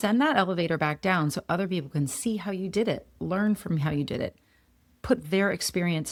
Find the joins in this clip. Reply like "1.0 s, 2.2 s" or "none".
none